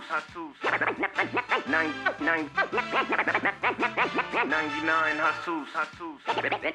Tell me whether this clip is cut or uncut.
uncut